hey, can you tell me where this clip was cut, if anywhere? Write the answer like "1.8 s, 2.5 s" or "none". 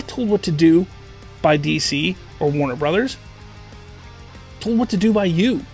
none